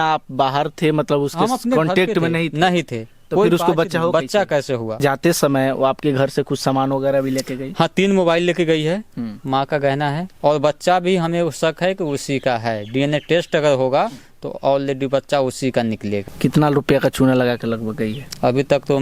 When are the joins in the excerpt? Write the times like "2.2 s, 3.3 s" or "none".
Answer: 5.0 s, 10.3 s, 16.3 s